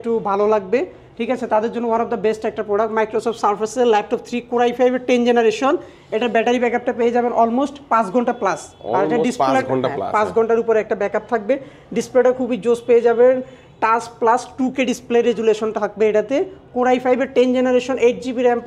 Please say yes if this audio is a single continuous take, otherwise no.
yes